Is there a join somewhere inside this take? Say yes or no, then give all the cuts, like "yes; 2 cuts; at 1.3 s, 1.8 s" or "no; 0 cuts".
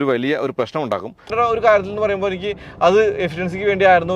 yes; 1 cut; at 1.3 s